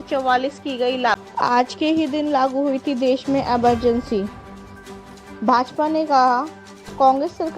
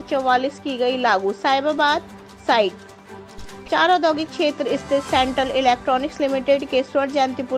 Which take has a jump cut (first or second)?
first